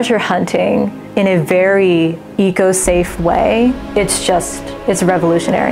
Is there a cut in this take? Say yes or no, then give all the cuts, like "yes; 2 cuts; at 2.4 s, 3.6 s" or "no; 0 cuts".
yes; 3 cuts; at 1.0 s, 2.2 s, 3.8 s